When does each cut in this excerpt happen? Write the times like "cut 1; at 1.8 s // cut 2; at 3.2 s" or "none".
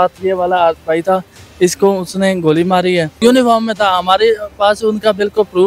cut 1; at 3.1 s